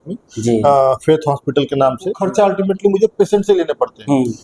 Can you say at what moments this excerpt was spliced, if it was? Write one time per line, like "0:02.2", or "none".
0:02.2